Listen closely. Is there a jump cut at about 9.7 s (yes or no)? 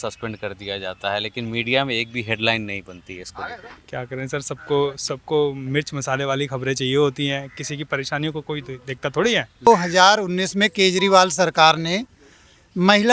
yes